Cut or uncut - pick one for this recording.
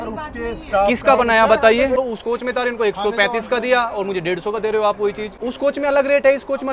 cut